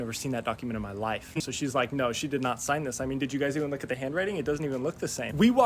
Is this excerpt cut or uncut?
cut